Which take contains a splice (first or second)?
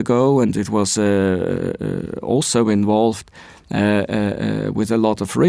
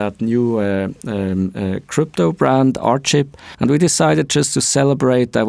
second